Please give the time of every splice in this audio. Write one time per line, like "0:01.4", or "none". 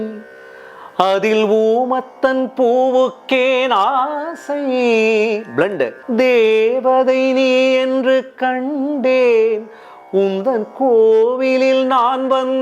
0:06.0